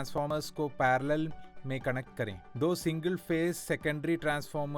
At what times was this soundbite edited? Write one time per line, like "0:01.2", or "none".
0:02.4